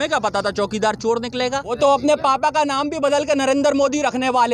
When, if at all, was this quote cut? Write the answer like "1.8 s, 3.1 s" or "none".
1.8 s